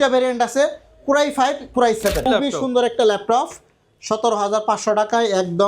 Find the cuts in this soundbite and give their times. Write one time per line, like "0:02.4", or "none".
0:02.3